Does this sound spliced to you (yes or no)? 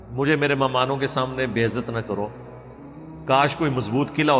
no